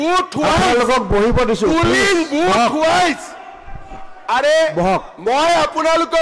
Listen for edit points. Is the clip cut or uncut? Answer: uncut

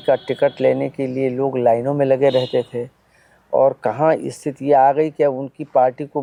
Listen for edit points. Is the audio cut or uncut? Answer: uncut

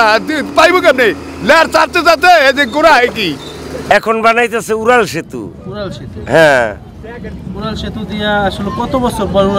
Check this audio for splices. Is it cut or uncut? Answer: cut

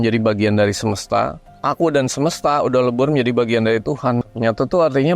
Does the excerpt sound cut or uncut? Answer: cut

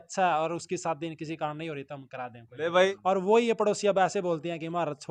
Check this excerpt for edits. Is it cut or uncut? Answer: cut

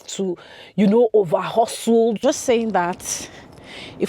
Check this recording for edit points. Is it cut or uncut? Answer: cut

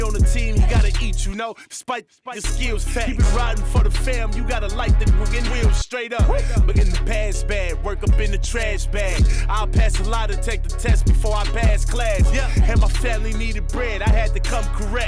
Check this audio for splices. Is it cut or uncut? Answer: uncut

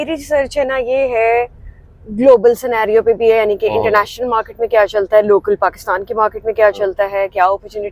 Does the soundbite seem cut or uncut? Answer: uncut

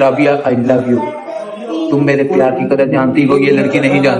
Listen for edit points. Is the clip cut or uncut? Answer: uncut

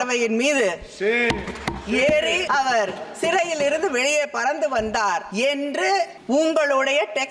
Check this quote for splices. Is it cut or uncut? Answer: cut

